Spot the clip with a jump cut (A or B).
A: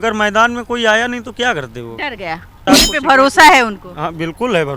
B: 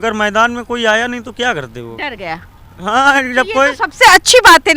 A